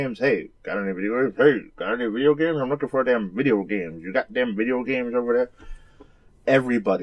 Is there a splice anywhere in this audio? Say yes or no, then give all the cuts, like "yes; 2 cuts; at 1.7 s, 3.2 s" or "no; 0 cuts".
yes; 1 cut; at 2.7 s